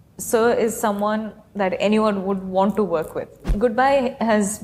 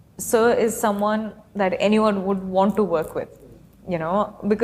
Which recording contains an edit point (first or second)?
first